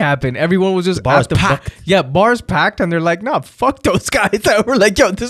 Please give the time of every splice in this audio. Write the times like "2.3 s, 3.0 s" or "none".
none